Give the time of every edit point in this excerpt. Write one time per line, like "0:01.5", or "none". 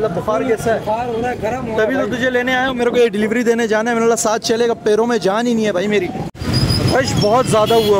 0:06.3